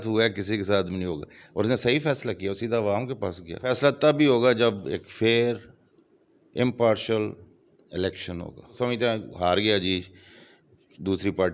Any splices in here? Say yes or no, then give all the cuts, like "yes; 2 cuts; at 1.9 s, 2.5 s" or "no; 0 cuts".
yes; 2 cuts; at 3.6 s, 8.8 s